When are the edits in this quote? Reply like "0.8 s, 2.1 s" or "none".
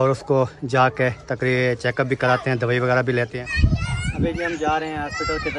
3.4 s

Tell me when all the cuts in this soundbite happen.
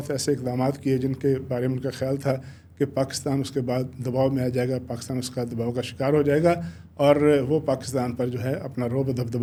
none

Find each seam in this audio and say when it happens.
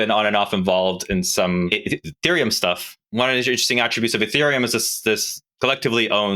1.7 s, 3.0 s, 5.4 s

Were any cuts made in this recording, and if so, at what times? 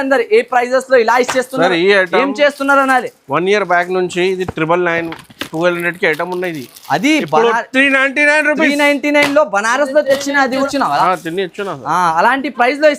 10.5 s

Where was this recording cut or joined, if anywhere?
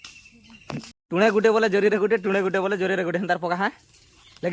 1.0 s

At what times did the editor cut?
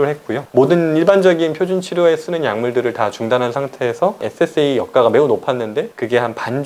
4.2 s

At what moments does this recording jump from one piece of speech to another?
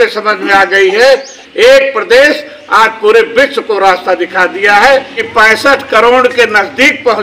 1.4 s, 5.2 s

